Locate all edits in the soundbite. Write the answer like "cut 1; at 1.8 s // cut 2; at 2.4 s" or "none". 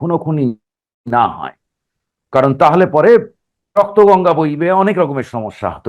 cut 1; at 3.6 s